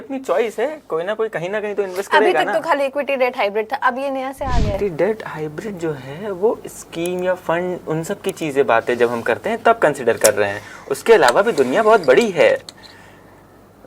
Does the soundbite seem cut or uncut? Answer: uncut